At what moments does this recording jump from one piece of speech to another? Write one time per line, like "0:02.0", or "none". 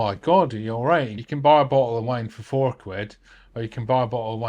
0:01.2